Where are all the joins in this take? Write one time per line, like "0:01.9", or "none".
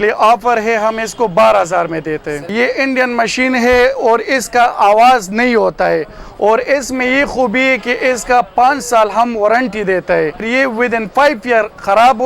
0:02.5
0:10.5